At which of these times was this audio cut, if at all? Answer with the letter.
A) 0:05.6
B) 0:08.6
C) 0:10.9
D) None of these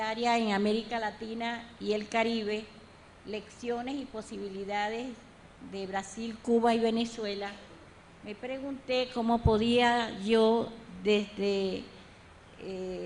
B